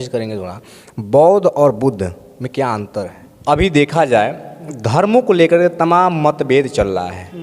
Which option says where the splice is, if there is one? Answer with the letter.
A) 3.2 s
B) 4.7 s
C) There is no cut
A